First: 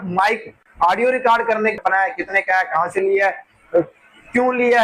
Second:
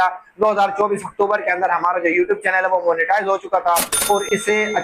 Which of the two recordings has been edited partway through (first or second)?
first